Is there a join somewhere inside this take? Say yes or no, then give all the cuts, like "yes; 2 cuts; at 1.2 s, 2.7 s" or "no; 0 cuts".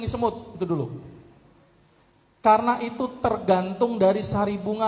no; 0 cuts